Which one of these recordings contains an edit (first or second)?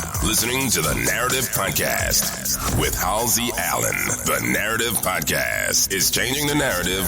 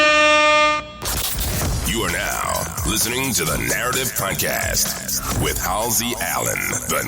second